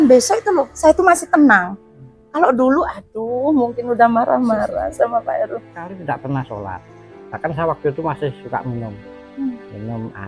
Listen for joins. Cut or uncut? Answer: cut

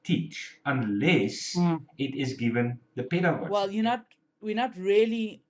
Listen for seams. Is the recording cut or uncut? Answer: cut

